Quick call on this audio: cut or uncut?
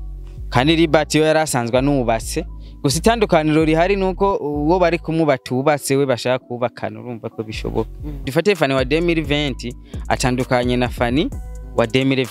cut